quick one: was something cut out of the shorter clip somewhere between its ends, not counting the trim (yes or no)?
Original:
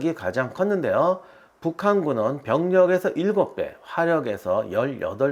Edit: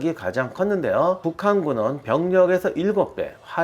yes